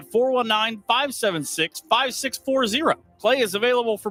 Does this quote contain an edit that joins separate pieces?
no; 0 cuts

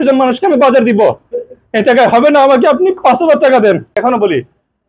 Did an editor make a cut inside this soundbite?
yes; 1 cut; at 3.9 s

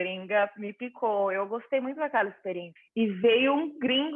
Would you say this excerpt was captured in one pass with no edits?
no; 1 cut; at 2.7 s

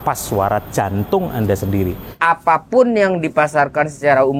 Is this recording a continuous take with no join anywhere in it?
no; 1 cut; at 2.1 s

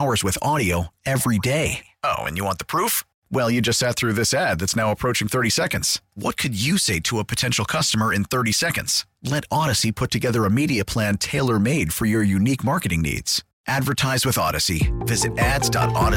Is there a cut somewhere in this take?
no; 0 cuts

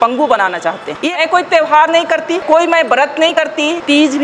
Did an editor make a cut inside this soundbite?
yes; 1 cut; at 1.0 s

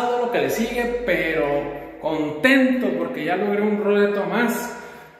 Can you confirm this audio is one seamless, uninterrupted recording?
yes; 0 cuts

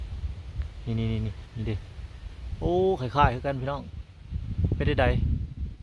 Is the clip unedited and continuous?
yes; 0 cuts

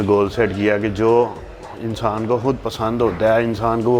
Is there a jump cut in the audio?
no; 0 cuts

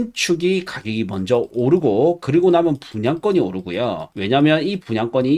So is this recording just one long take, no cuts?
no; 1 cut; at 4.1 s

